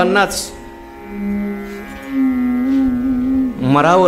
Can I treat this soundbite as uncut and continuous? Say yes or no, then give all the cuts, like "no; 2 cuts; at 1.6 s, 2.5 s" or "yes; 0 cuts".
yes; 0 cuts